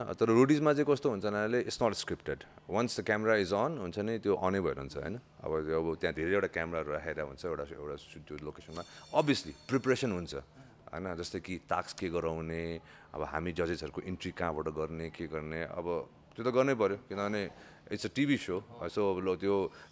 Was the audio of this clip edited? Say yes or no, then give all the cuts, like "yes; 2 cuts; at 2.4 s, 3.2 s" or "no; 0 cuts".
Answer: no; 0 cuts